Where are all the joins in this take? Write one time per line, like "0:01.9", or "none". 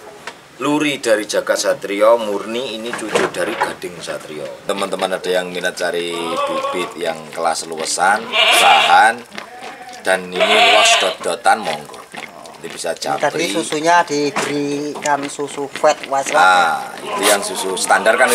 0:04.7